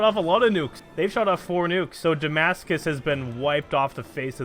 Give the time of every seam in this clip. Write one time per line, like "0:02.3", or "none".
none